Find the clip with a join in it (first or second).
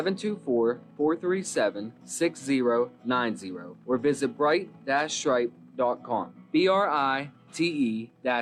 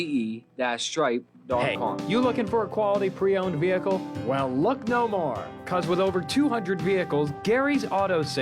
second